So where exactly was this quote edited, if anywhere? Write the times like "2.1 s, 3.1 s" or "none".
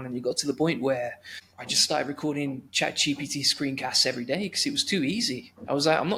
none